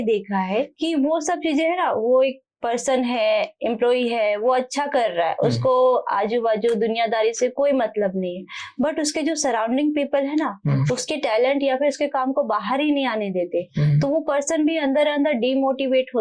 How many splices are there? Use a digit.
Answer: 0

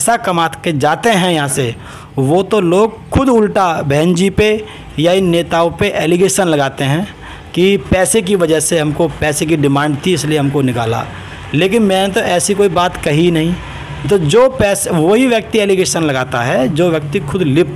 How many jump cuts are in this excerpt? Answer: 0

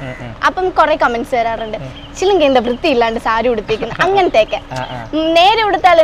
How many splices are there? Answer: 0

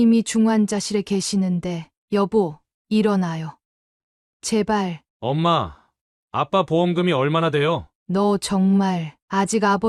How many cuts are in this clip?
2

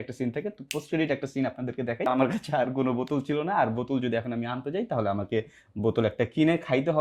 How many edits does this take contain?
1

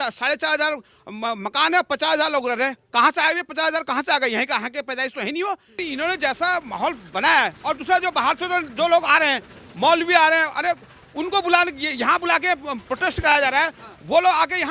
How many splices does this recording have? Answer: 1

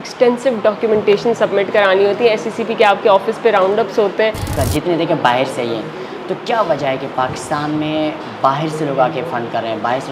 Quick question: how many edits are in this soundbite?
1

